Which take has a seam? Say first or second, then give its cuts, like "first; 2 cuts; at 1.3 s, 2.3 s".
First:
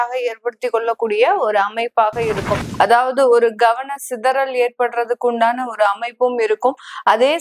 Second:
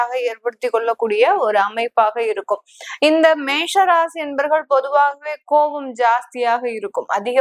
first; 1 cut; at 2.6 s